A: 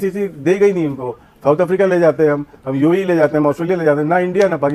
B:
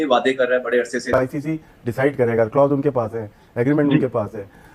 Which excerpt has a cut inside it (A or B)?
B